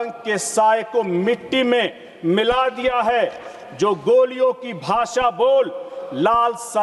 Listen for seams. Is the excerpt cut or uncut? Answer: uncut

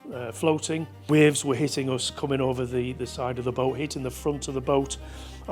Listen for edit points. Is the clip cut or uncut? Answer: cut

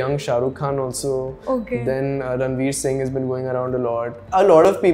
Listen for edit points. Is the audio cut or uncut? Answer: uncut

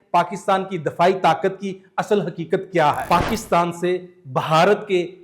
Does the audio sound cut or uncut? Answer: cut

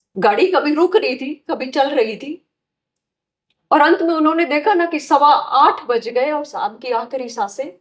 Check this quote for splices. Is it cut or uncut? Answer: uncut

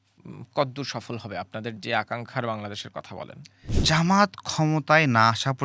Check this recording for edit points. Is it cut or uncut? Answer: cut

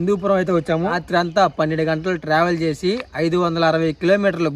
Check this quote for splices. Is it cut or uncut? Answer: cut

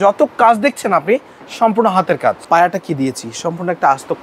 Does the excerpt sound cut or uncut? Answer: cut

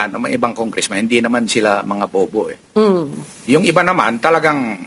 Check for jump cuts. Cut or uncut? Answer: uncut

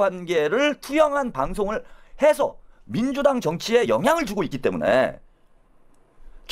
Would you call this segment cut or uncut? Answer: uncut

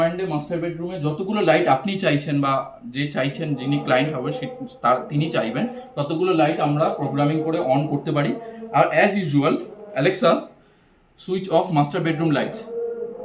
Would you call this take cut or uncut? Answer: uncut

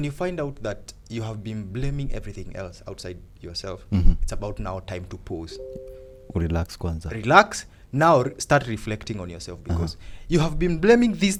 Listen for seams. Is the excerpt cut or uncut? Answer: uncut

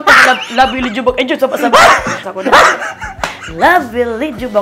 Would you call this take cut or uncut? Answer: cut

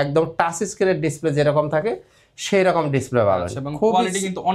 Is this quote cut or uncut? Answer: uncut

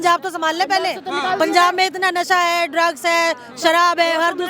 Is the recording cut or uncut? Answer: uncut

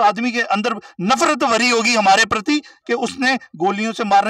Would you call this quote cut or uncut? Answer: uncut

